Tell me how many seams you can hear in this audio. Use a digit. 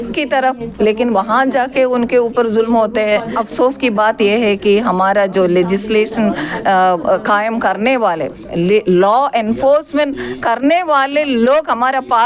1